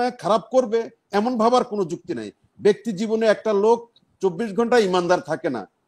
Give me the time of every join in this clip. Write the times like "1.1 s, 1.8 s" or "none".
none